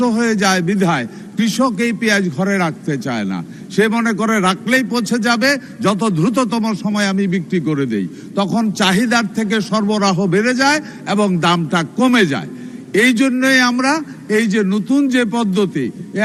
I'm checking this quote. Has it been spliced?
no; 0 cuts

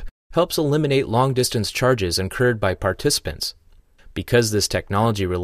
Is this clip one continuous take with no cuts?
no; 1 cut; at 2.8 s

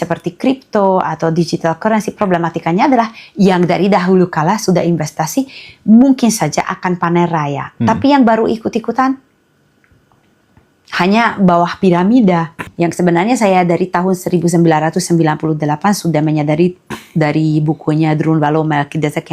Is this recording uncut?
no; 1 cut; at 12.6 s

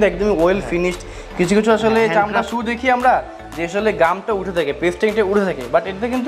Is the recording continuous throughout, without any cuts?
yes; 0 cuts

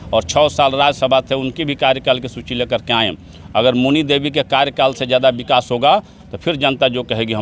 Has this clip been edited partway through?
no; 0 cuts

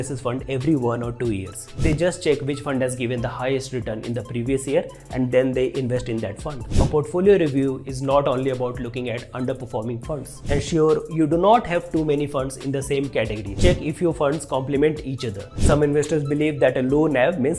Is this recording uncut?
no; 5 cuts; at 2.0 s, 6.7 s, 10.6 s, 13.8 s, 15.7 s

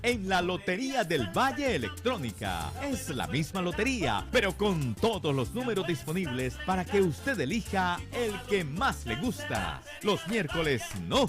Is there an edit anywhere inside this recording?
no; 0 cuts

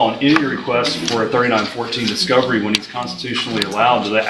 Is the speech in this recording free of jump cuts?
yes; 0 cuts

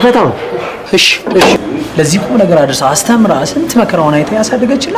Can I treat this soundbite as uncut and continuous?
no; 1 cut; at 1.6 s

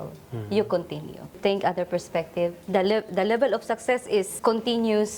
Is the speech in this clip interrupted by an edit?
yes; 3 cuts; at 1.4 s, 2.6 s, 4.3 s

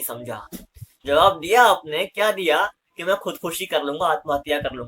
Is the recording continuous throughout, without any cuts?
yes; 0 cuts

